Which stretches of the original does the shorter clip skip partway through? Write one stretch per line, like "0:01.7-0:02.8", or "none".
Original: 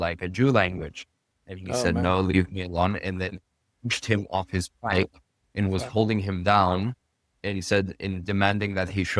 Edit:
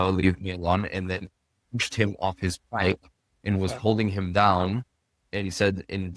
none